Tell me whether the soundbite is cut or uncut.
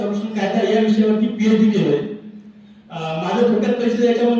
uncut